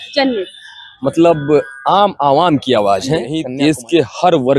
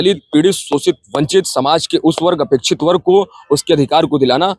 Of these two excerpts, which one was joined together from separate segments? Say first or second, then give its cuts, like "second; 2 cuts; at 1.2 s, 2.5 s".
first; 1 cut; at 3.4 s